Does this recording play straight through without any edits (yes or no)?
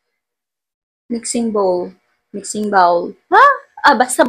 yes